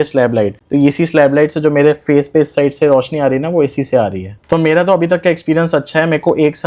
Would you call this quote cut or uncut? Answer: uncut